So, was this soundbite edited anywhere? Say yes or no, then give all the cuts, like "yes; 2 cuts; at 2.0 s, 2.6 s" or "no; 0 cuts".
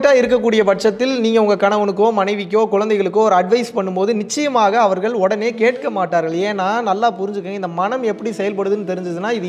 no; 0 cuts